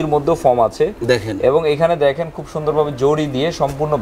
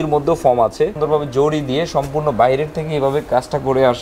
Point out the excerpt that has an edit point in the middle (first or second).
second